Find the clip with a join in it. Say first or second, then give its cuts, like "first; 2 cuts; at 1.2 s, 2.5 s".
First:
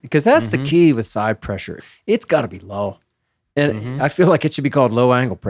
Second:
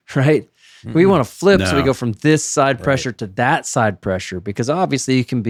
first; 1 cut; at 1.7 s